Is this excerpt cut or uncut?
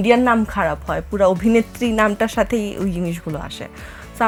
uncut